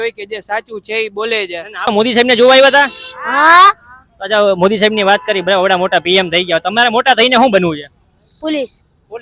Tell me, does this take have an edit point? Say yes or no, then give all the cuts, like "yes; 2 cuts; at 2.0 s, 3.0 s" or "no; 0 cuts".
yes; 1 cut; at 1.7 s